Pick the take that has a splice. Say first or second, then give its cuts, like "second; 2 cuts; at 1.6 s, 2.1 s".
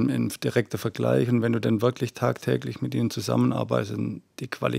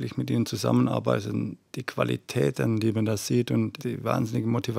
second; 1 cut; at 3.8 s